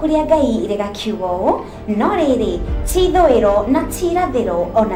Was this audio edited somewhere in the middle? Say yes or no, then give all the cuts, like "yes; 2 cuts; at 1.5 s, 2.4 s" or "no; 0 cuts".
no; 0 cuts